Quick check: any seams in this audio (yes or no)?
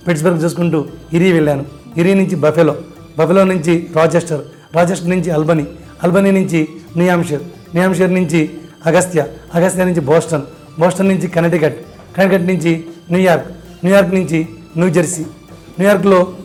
no